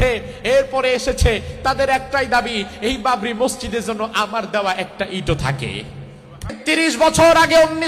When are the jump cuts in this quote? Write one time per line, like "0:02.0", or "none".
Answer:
0:06.6